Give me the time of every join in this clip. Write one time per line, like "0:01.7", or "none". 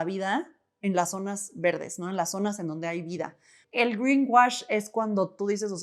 0:03.5